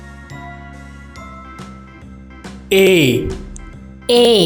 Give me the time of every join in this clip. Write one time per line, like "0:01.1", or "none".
0:02.6